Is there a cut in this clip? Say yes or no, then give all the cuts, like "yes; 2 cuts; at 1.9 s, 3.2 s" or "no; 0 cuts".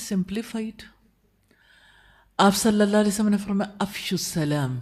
no; 0 cuts